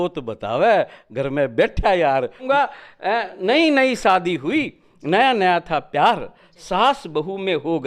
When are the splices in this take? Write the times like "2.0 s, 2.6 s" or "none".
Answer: 2.4 s